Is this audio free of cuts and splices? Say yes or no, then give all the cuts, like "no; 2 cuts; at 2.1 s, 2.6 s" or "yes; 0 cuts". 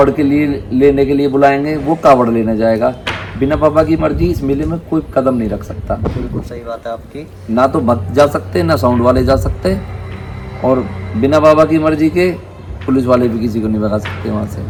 yes; 0 cuts